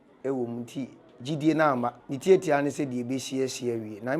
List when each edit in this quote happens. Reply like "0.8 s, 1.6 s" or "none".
2.0 s